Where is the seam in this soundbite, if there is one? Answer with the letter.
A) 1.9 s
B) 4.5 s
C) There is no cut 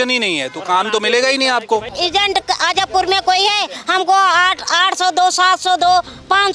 A